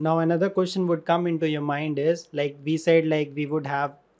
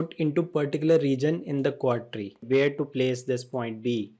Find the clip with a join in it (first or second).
second